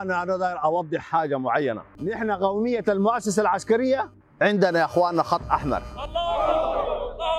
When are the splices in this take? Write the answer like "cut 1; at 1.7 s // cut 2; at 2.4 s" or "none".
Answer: cut 1; at 1.9 s